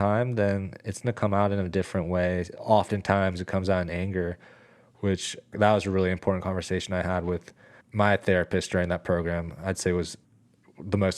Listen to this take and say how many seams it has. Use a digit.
3